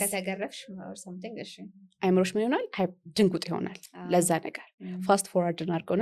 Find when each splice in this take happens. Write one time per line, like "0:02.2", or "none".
none